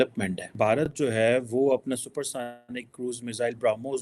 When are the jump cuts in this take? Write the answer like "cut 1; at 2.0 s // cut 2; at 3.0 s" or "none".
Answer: cut 1; at 0.9 s